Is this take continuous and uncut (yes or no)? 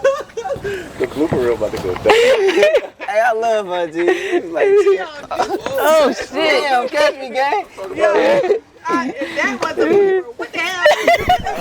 yes